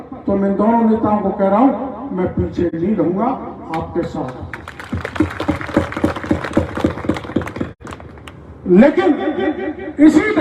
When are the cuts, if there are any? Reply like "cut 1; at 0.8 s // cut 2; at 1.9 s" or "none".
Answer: none